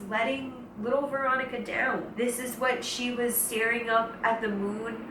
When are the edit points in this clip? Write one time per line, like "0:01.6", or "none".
0:02.1